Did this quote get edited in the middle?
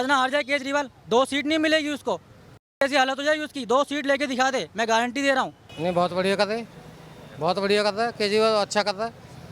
yes; 1 cut; at 5.6 s

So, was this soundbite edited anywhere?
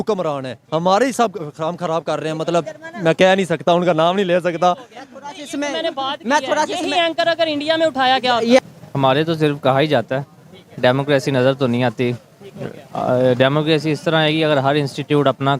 yes; 1 cut; at 8.6 s

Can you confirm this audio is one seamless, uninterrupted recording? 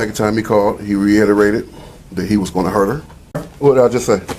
no; 1 cut; at 3.4 s

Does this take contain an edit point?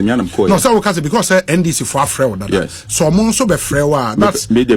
no; 0 cuts

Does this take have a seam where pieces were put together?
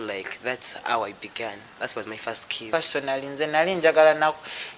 yes; 1 cut; at 2.7 s

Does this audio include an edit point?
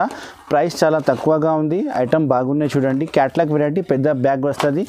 no; 0 cuts

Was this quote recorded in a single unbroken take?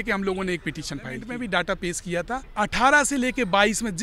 no; 2 cuts; at 1.3 s, 2.5 s

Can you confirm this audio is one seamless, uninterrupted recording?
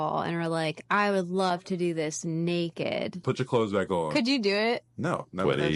no; 1 cut; at 3.2 s

